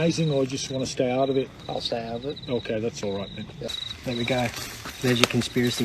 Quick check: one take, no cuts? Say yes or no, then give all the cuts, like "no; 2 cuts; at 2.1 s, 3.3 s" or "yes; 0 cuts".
no; 1 cut; at 3.7 s